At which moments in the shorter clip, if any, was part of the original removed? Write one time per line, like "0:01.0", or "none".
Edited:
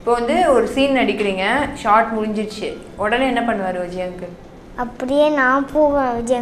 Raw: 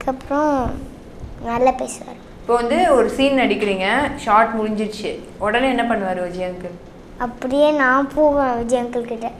none